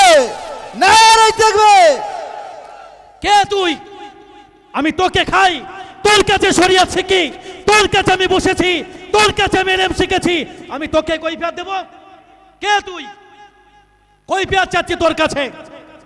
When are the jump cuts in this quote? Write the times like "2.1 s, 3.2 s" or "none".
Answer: none